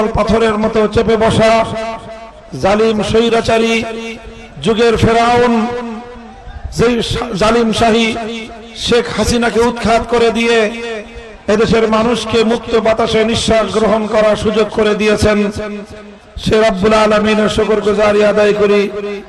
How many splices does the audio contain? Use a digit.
0